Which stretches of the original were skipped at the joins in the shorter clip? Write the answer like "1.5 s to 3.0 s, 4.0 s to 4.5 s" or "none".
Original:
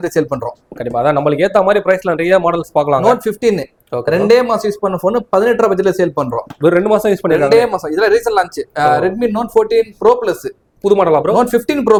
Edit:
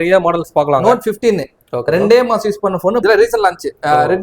5.2 s to 8.0 s